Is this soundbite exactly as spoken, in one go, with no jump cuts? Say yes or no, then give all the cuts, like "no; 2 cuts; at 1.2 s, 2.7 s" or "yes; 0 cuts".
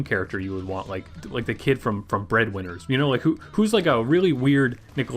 no; 1 cut; at 1.2 s